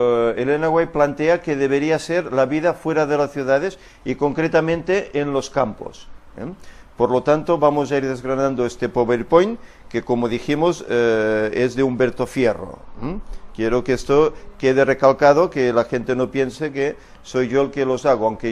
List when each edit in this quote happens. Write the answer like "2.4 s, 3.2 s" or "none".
none